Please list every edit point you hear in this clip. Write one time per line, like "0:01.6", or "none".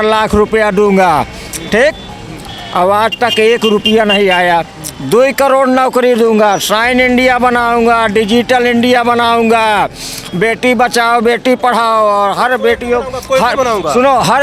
none